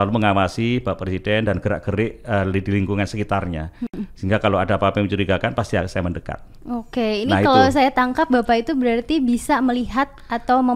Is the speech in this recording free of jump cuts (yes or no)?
yes